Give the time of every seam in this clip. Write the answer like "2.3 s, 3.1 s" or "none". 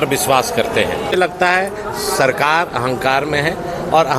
1.1 s